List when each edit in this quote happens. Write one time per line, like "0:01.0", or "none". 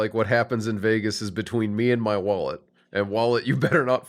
none